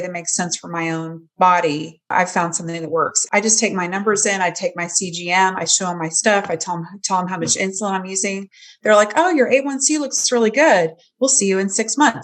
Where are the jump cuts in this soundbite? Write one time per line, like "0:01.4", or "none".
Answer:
0:02.1
0:03.2